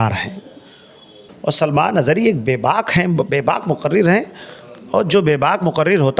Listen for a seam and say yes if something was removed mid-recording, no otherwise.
yes